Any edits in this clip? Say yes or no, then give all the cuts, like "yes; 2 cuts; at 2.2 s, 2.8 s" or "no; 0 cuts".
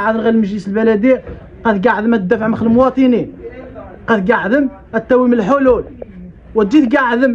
no; 0 cuts